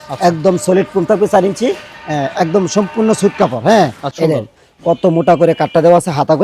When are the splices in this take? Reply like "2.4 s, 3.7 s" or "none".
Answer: 4.1 s

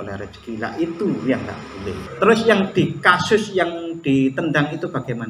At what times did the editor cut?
2.1 s

